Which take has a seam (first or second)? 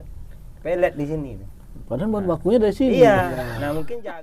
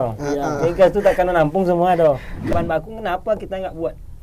second